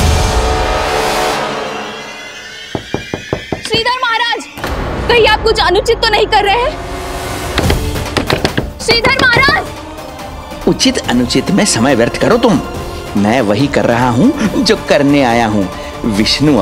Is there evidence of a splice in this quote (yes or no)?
no